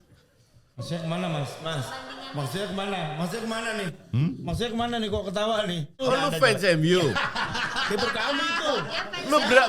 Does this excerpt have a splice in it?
yes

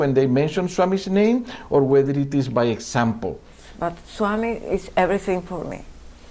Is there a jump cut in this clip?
yes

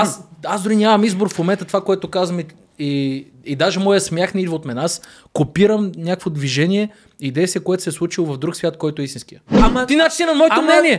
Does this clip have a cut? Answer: yes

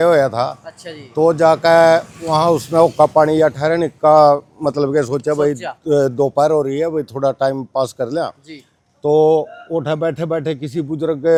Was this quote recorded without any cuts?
yes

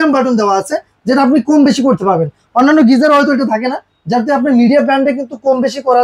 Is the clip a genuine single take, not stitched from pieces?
yes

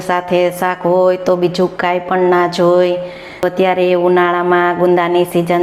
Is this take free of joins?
no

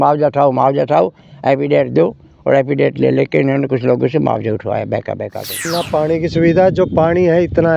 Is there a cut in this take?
yes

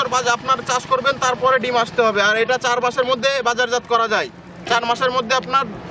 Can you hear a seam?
no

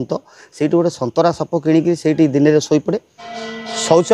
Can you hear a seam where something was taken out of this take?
no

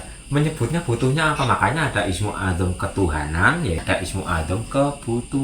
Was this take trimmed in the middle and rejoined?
yes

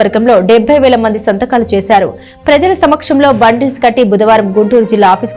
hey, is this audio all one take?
yes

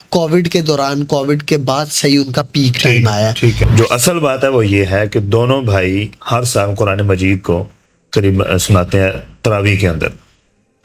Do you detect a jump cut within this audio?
yes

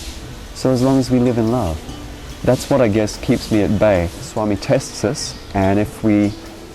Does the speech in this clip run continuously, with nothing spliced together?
no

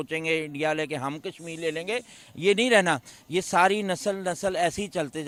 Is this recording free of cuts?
yes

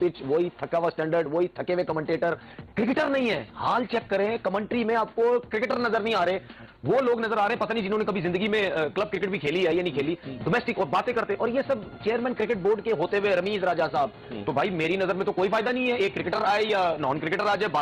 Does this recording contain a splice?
no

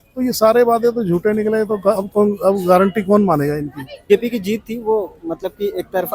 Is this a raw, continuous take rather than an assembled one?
no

